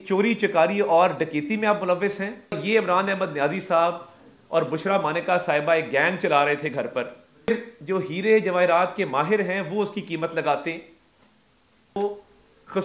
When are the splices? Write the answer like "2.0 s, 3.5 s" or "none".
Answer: 2.6 s, 7.5 s, 12.0 s